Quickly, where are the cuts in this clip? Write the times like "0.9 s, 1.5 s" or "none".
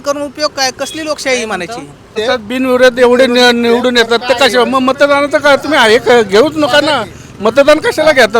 2.2 s